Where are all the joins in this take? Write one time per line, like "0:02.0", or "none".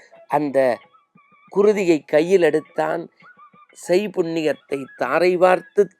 none